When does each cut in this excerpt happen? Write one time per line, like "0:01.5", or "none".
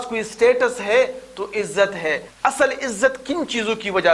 0:02.3